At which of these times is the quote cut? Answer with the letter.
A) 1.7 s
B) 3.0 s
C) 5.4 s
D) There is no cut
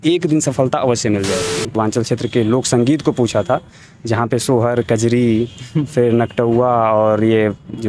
A